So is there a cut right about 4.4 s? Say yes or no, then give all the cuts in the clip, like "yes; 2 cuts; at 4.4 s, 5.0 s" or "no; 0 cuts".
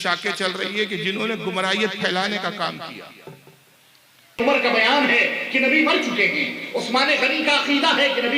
yes; 1 cut; at 4.4 s